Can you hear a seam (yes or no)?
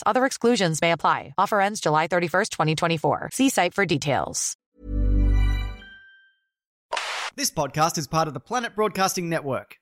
yes